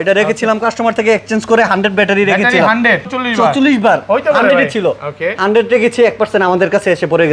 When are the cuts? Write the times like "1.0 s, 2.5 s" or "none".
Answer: 3.1 s